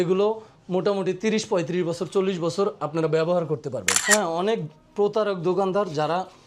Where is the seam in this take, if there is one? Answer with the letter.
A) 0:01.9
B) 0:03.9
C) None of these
B